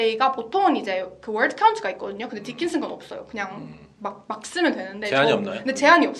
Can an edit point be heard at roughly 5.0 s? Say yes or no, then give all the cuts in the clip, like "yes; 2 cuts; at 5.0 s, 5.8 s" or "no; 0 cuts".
no; 0 cuts